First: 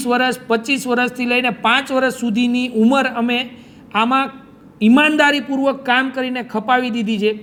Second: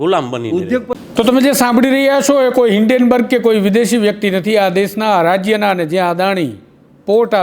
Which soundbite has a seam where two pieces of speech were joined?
second; 1 cut; at 0.9 s

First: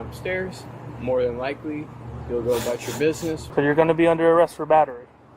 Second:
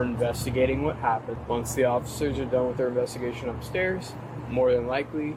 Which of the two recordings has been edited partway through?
first; 1 cut; at 3.4 s

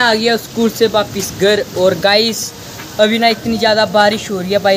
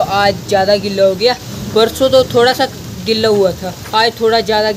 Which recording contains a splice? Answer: second; 1 cut; at 3.7 s

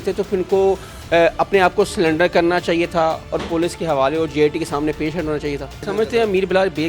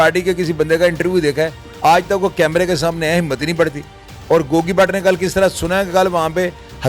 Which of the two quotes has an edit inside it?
first; 1 cut; at 5.8 s

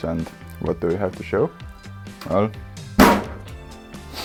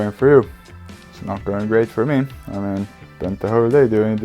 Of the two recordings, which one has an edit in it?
second; 1 cut; at 3.0 s

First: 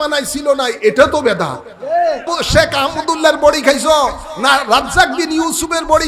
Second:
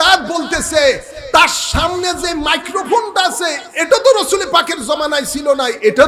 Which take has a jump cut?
first; 1 cut; at 2.3 s

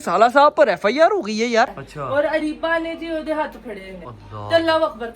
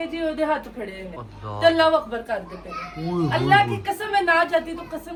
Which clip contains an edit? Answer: first; 1 cut; at 1.9 s

